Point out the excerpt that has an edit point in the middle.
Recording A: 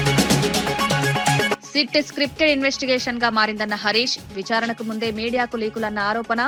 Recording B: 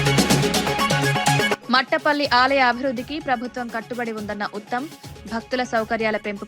B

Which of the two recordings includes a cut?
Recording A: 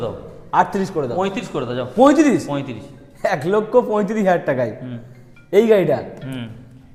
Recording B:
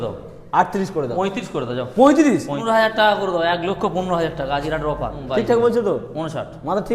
B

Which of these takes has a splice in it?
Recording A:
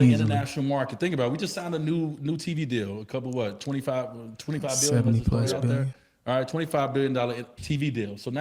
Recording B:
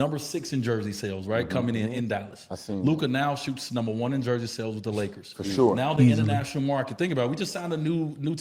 A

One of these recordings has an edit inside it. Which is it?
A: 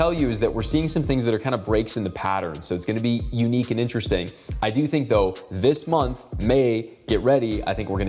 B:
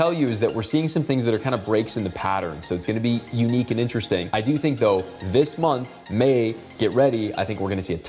B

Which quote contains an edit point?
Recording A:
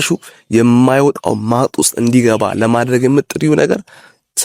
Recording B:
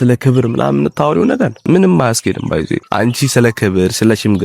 B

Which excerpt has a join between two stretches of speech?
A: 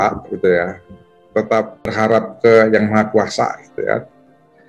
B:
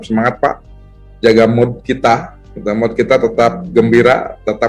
A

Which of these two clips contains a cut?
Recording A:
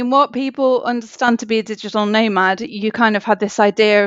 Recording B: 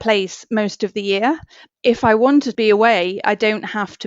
B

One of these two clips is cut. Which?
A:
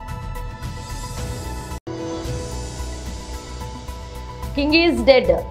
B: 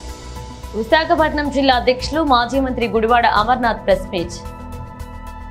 B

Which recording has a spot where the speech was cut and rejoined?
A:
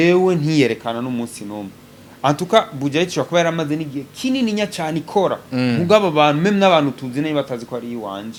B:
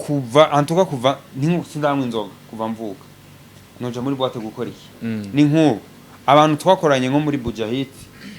B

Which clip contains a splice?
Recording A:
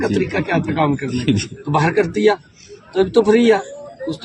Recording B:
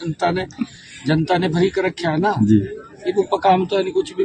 A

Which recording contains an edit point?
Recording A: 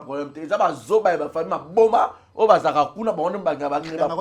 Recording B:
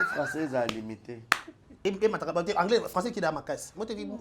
B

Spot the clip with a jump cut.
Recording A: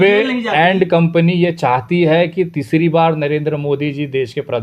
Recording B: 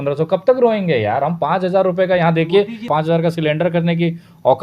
B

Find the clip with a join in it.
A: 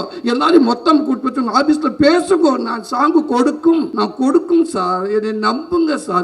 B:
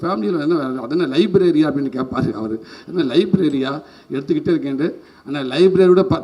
A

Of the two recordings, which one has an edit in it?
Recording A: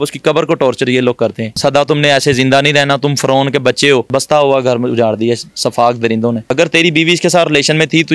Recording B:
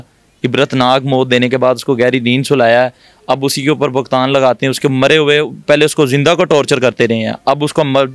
A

